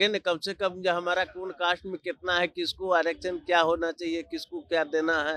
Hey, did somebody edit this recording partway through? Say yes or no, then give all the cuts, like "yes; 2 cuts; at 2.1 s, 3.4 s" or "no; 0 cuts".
no; 0 cuts